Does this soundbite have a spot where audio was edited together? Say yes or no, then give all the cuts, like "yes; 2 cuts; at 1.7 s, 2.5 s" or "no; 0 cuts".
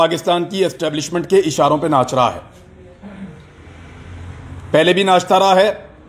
no; 0 cuts